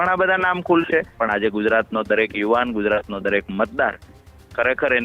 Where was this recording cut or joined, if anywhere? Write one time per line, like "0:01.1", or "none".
0:01.1